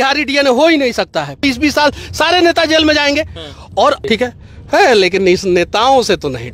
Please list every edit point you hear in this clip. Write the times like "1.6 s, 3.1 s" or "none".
1.4 s, 4.0 s